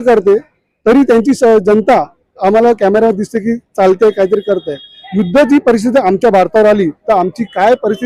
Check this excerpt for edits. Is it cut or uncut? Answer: uncut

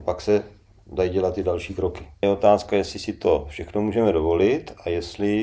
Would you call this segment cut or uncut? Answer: cut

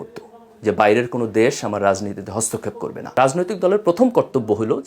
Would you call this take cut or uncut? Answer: cut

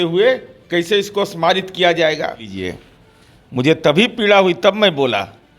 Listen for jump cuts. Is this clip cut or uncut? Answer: cut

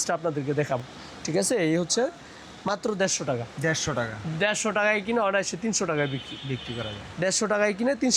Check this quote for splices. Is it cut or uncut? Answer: uncut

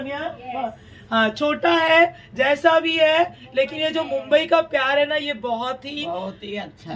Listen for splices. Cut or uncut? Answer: uncut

